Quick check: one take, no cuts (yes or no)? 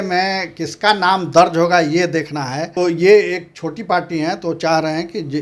no